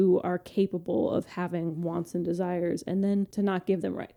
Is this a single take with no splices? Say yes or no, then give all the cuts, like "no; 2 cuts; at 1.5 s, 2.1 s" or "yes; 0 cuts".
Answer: yes; 0 cuts